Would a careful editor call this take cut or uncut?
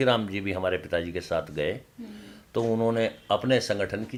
uncut